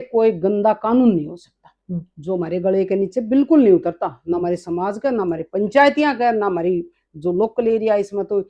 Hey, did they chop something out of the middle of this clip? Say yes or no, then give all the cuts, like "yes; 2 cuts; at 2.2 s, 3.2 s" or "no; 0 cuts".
no; 0 cuts